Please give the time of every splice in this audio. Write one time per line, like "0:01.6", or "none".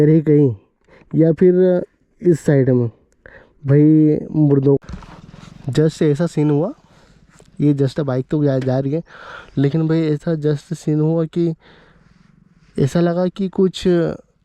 0:04.8